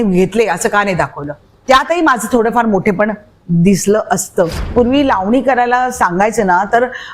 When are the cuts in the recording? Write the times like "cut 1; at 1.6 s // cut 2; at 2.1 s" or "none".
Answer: cut 1; at 4.7 s